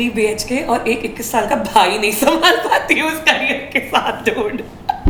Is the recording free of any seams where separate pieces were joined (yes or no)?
yes